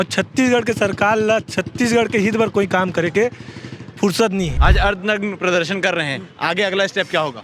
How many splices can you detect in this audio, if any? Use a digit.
1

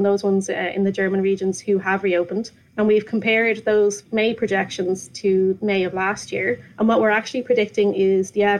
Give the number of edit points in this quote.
2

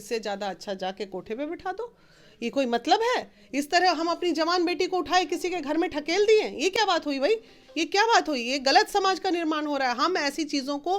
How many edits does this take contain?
0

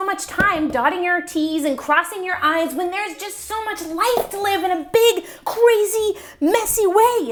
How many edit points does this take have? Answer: 0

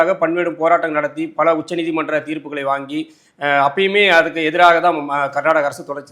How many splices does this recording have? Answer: 0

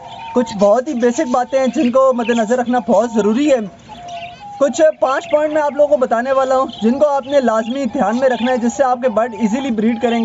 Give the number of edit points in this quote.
0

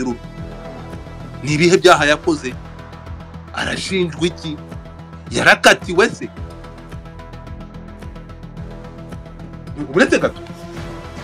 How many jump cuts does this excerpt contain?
3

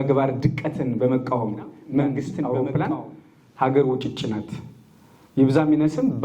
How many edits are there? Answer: 1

